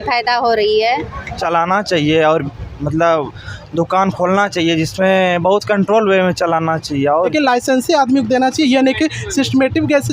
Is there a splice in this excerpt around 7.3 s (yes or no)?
yes